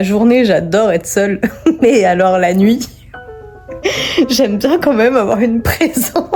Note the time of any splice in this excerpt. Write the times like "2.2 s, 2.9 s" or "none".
none